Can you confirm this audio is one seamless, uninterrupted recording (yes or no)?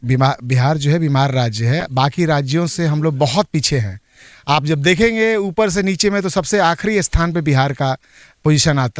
yes